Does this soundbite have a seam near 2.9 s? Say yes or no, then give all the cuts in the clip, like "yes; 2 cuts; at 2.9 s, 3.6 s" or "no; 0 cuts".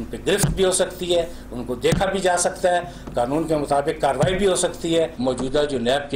no; 1 cut; at 5.1 s